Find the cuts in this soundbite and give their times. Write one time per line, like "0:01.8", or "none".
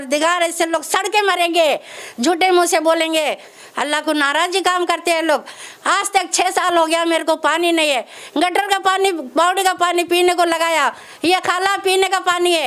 none